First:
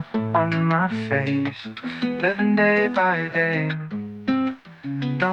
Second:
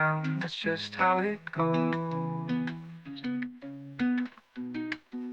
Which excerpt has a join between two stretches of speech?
second; 1 cut; at 2.0 s

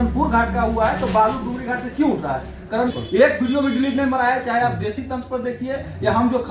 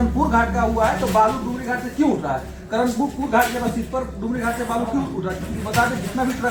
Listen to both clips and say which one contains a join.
first; 1 cut; at 2.9 s

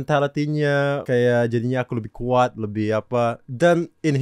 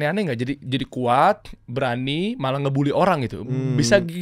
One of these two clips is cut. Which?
first; 1 cut; at 1.0 s

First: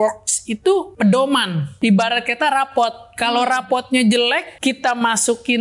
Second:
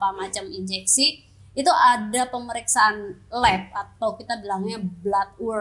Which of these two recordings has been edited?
first; 3 cuts; at 0.9 s, 1.7 s, 4.5 s

